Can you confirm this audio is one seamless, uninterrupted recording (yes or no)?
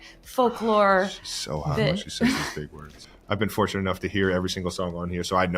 no